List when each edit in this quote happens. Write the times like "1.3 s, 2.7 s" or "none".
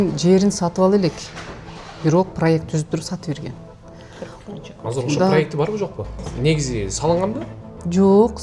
6.3 s